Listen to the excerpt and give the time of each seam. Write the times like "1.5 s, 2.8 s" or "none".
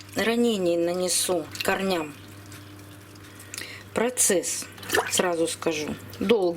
1.5 s, 3.3 s